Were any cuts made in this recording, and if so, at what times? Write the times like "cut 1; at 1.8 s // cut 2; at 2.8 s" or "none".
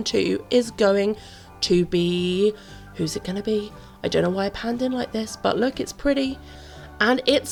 none